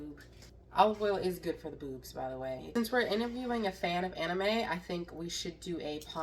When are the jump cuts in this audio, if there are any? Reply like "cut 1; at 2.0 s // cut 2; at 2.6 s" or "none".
cut 1; at 2.6 s